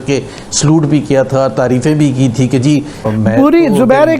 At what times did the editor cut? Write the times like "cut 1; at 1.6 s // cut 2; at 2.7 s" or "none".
cut 1; at 3.0 s